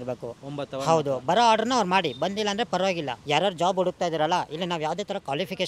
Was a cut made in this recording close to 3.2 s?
yes; 1 cut; at 3.2 s

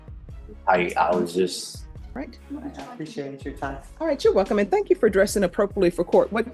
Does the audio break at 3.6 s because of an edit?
no; 1 cut; at 2.1 s

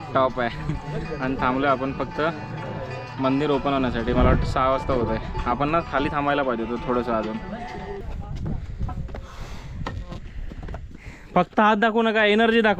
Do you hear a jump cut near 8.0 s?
yes; 1 cut; at 8.0 s

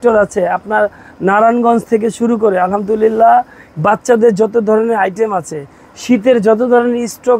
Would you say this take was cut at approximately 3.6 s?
yes; 1 cut; at 3.6 s

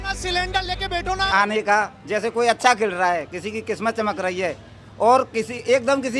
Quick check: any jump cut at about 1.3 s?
yes; 1 cut; at 1.3 s

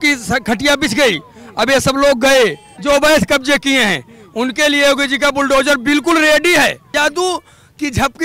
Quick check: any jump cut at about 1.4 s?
no; 2 cuts; at 2.7 s, 6.9 s

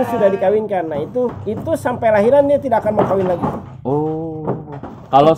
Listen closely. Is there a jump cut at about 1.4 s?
yes; 1 cut; at 1.4 s

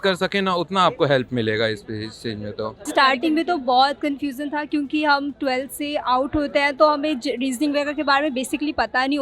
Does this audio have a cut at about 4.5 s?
no; 1 cut; at 2.8 s

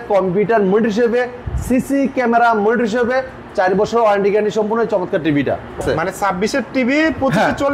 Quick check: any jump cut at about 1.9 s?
no; 1 cut; at 5.8 s

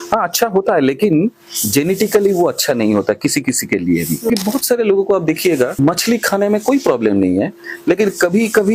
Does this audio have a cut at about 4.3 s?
yes; 2 cuts; at 4.3 s, 5.7 s

